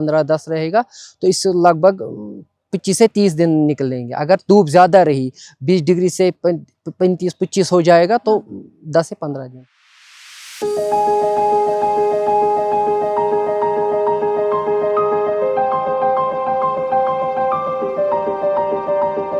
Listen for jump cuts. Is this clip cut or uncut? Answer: uncut